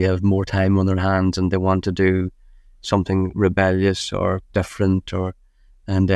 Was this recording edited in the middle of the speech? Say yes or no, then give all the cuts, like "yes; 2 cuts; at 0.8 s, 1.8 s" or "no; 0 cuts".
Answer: no; 0 cuts